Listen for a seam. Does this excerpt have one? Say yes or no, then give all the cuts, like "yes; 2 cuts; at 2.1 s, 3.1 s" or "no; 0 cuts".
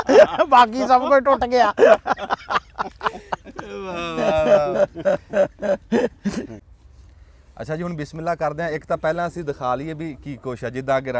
no; 0 cuts